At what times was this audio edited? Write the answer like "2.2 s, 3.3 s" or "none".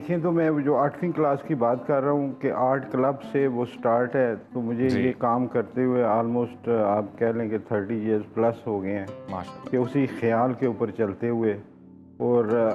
none